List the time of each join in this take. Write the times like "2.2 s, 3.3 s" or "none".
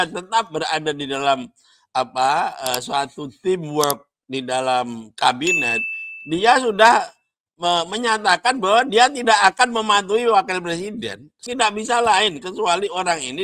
11.3 s